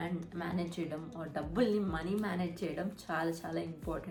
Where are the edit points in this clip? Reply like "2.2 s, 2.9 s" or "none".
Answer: none